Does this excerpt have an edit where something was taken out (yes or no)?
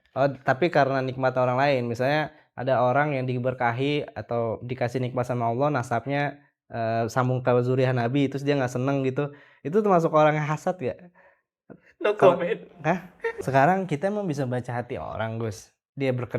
yes